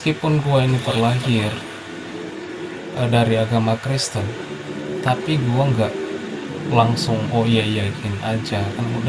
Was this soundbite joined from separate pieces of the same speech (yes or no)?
no